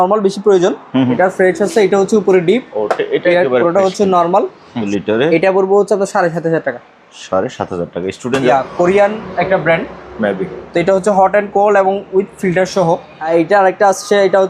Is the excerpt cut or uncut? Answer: cut